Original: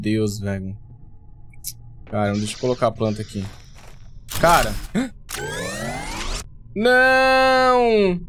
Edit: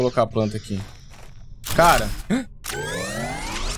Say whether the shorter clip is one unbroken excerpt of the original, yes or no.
yes